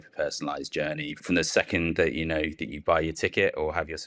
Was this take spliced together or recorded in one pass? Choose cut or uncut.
cut